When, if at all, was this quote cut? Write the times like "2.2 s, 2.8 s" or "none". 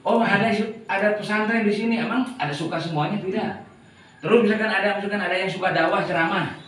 none